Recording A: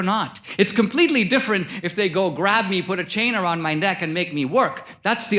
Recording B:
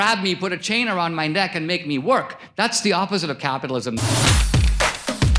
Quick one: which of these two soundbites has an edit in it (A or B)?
B